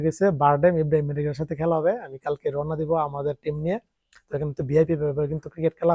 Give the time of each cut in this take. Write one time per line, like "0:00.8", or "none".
none